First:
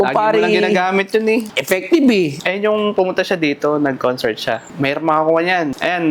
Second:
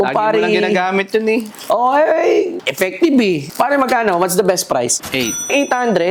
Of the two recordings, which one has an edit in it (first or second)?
first